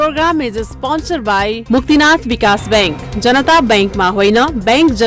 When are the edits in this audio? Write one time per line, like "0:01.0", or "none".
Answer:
none